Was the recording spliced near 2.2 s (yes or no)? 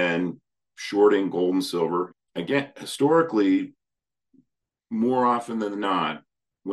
yes